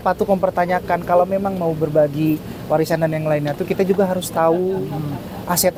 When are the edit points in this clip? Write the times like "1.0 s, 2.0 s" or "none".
none